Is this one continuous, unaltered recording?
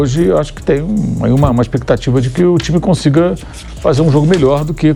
yes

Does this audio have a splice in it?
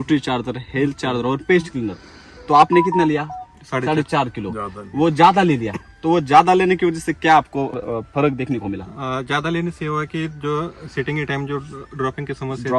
yes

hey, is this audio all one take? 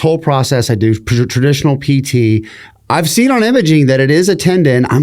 yes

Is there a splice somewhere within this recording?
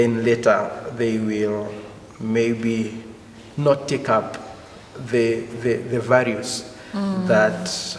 no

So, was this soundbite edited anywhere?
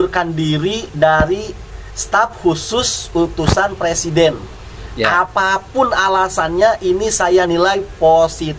no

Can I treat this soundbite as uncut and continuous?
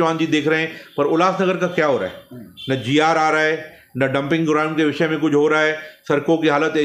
yes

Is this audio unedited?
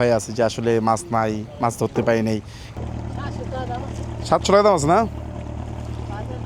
no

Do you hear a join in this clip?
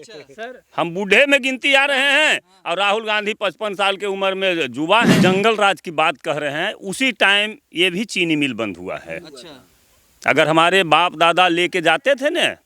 yes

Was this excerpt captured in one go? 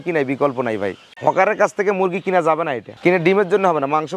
no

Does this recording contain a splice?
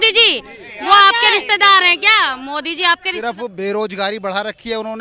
yes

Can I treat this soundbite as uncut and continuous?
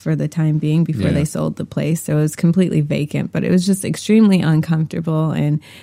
yes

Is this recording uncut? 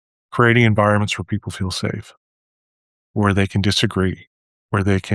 yes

